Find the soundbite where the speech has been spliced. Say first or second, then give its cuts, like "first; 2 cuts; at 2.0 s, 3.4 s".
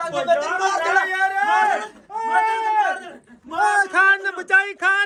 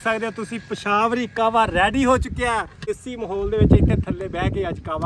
second; 1 cut; at 3.0 s